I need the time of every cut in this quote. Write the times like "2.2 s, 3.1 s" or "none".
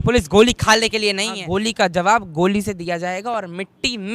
1.4 s